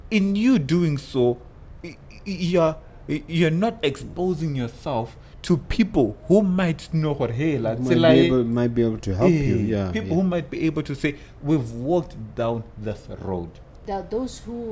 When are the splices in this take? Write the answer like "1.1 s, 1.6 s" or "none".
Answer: 13.6 s